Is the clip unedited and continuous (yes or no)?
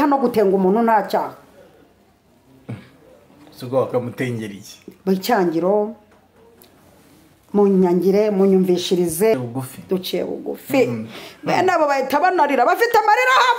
no